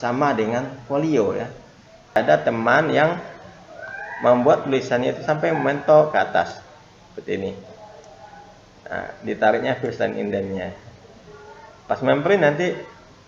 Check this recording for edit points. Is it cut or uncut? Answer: cut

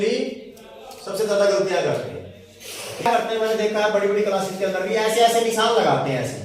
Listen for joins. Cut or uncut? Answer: cut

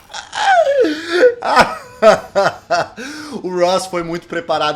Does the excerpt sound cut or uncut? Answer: uncut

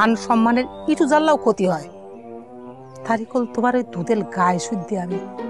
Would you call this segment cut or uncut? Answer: uncut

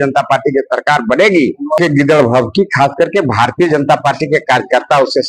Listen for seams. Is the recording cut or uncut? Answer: cut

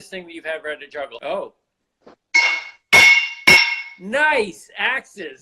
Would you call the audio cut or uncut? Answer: cut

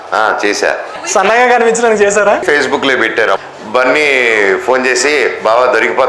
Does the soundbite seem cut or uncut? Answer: cut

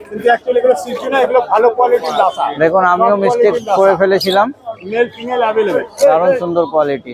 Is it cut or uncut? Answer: uncut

